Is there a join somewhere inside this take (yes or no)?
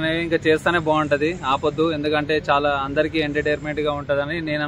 no